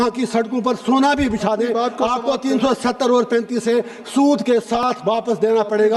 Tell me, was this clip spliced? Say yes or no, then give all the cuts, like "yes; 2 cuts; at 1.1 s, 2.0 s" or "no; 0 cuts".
no; 0 cuts